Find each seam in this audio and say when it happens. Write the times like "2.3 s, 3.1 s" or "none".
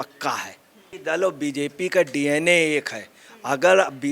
1.0 s